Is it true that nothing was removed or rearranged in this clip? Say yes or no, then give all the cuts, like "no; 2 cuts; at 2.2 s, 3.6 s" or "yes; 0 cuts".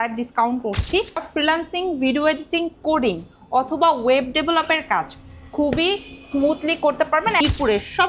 no; 2 cuts; at 1.3 s, 7.4 s